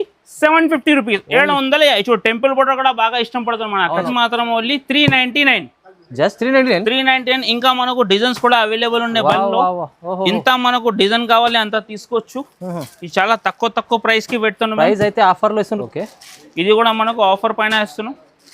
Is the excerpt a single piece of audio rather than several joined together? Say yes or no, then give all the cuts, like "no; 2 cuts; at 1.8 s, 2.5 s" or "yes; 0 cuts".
no; 2 cuts; at 4.1 s, 15.8 s